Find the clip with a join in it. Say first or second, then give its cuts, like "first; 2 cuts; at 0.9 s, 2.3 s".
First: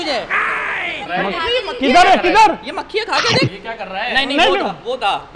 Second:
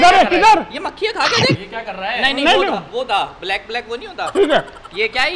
first; 1 cut; at 1.0 s